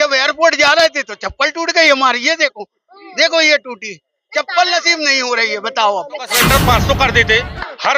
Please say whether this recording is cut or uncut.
cut